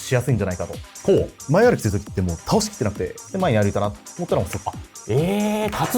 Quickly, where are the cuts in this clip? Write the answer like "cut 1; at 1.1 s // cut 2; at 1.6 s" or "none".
cut 1; at 1.4 s // cut 2; at 3.1 s